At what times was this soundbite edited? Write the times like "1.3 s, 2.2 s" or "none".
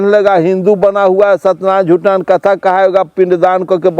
none